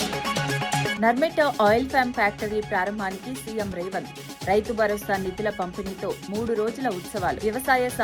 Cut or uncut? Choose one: cut